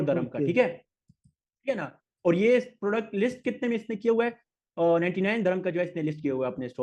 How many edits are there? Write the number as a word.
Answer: zero